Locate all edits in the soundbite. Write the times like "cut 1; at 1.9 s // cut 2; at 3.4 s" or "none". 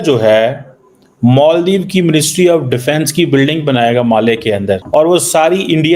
cut 1; at 4.8 s